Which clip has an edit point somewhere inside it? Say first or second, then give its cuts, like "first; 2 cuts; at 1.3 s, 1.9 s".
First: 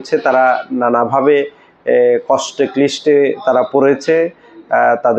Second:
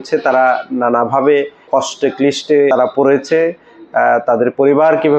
second; 2 cuts; at 1.7 s, 2.7 s